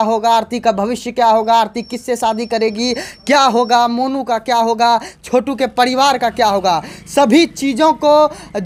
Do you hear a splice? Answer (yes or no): no